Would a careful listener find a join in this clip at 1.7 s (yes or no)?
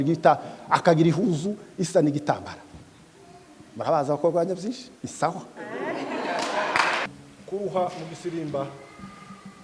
no